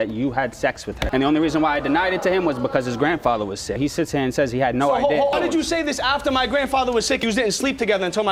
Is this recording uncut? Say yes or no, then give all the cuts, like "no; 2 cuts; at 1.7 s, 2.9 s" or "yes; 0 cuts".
yes; 0 cuts